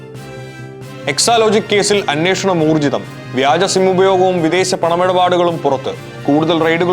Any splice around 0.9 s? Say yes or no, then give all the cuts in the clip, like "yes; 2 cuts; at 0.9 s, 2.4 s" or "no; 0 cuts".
yes; 1 cut; at 0.9 s